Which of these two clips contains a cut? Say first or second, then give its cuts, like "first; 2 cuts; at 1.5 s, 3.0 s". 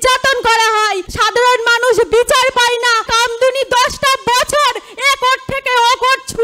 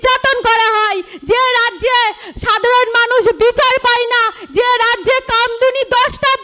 first; 2 cuts; at 1.1 s, 3.1 s